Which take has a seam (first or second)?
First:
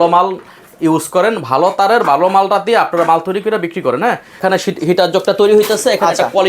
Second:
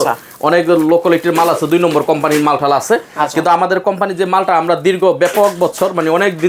first